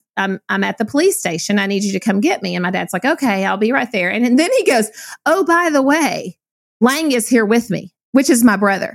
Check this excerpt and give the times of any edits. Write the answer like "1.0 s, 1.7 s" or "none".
none